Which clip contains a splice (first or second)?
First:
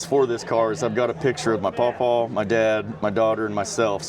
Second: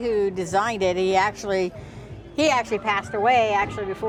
first